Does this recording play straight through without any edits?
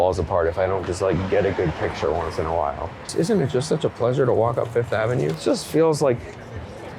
no; 2 cuts; at 3.1 s, 5.4 s

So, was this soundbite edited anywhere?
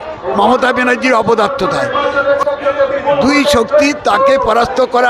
yes; 1 cut; at 2.4 s

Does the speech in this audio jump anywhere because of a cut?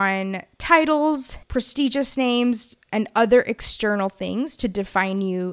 no; 0 cuts

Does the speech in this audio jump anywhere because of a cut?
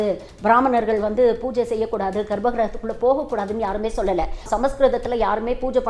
yes; 1 cut; at 4.5 s

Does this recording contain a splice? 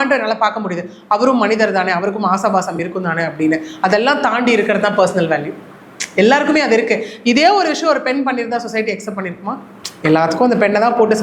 no; 0 cuts

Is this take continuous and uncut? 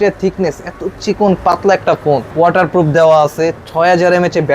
no; 1 cut; at 2.3 s

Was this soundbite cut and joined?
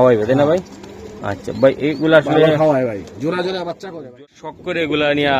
yes; 1 cut; at 4.2 s

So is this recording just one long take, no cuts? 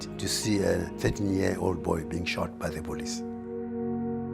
yes; 0 cuts

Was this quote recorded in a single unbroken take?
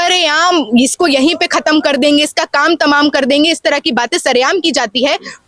yes; 0 cuts

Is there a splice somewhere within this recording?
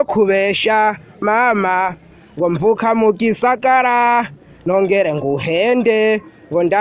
no; 0 cuts

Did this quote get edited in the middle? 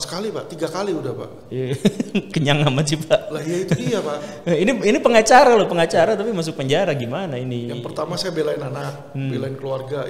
no; 0 cuts

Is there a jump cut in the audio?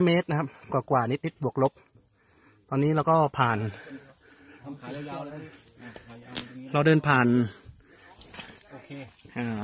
no; 0 cuts

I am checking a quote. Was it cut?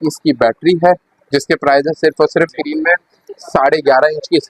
yes; 1 cut; at 2.6 s

